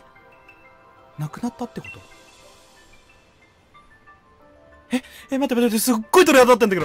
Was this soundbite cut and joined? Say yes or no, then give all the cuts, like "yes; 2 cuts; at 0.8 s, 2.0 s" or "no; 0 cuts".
no; 0 cuts